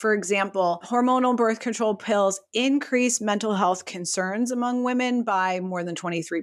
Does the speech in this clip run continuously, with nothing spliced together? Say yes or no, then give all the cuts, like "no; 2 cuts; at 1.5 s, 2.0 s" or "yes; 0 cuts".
yes; 0 cuts